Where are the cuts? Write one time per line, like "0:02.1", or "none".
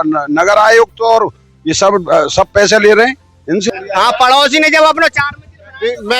0:03.6